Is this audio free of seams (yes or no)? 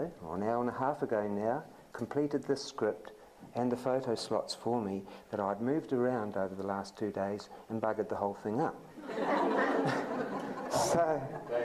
yes